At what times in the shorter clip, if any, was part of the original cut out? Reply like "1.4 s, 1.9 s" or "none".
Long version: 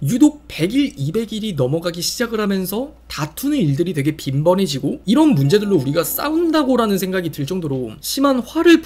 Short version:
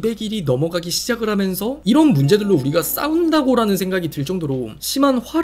1.8 s